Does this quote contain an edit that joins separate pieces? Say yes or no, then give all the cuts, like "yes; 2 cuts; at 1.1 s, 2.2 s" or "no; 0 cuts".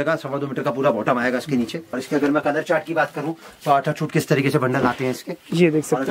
yes; 1 cut; at 1.9 s